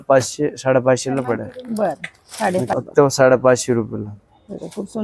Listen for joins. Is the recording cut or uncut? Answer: cut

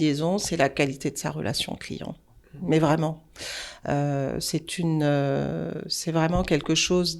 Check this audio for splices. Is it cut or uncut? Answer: uncut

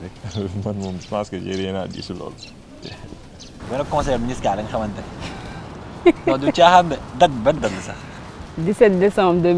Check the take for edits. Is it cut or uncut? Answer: cut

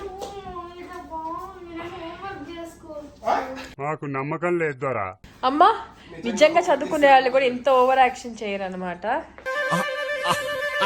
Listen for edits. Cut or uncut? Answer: uncut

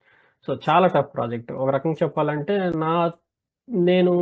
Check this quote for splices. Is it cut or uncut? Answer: uncut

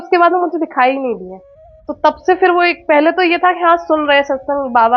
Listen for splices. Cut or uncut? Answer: uncut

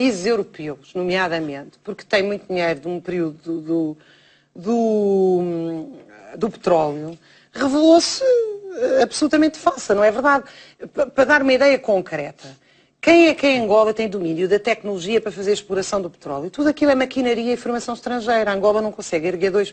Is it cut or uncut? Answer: uncut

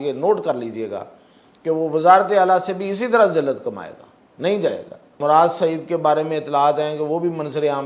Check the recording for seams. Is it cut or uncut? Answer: cut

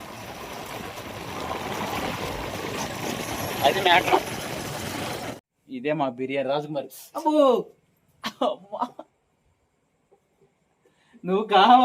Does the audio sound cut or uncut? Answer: cut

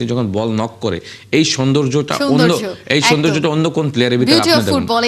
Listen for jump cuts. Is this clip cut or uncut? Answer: uncut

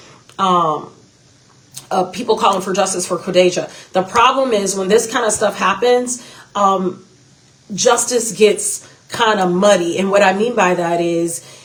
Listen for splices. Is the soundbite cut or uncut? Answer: uncut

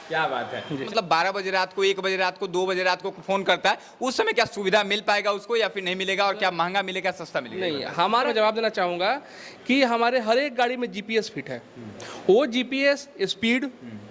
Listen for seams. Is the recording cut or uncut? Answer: cut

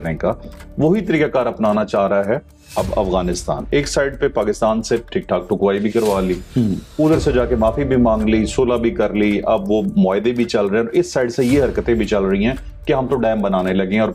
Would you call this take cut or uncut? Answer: uncut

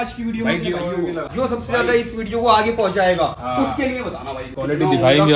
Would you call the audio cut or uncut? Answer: cut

